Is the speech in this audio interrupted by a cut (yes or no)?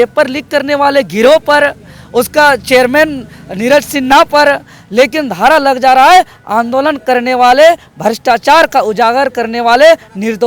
no